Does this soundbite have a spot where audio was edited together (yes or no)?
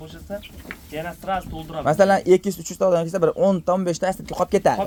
no